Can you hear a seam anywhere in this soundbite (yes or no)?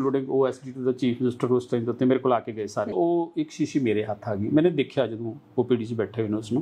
yes